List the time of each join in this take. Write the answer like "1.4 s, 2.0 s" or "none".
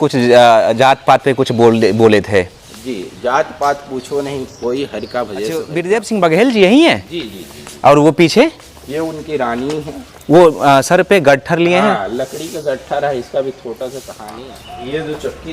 5.8 s, 14.2 s